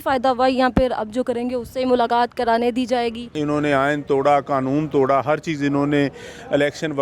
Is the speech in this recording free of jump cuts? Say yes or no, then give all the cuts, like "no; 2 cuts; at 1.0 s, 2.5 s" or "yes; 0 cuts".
no; 1 cut; at 3.4 s